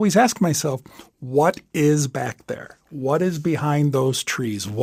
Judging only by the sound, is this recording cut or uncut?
uncut